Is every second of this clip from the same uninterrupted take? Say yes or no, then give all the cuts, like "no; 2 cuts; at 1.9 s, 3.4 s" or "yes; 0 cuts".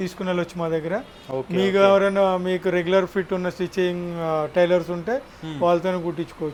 yes; 0 cuts